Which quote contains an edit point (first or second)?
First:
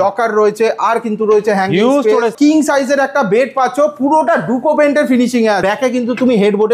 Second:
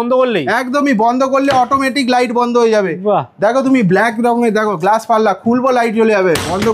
first